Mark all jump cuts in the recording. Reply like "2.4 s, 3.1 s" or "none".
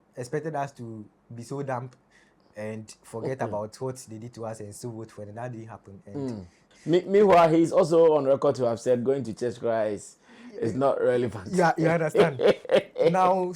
6.6 s